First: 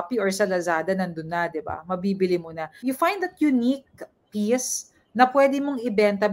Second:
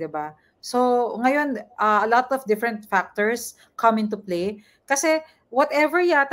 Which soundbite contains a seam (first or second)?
first